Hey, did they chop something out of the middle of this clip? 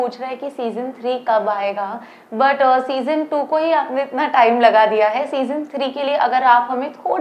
no; 0 cuts

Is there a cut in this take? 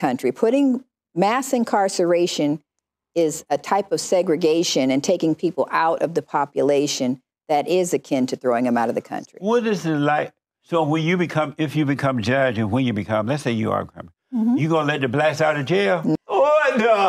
yes; 1 cut; at 16.1 s

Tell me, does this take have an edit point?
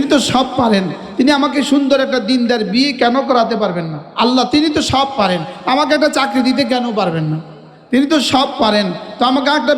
yes; 1 cut; at 4.1 s

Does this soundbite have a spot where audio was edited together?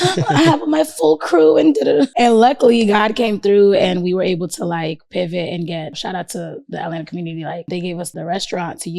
yes; 3 cuts; at 2.1 s, 6.0 s, 8.0 s

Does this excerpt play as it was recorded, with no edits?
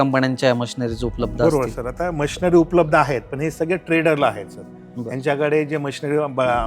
yes; 0 cuts

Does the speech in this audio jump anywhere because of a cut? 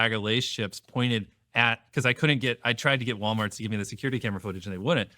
yes; 1 cut; at 3.1 s

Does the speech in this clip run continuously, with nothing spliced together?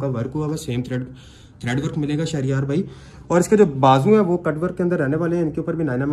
yes; 0 cuts

